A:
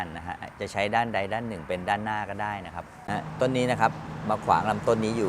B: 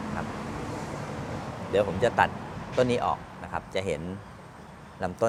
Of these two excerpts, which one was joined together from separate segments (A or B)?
A